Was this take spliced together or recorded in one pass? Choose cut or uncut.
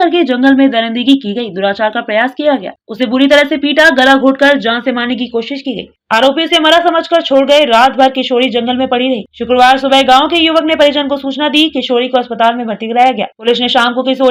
uncut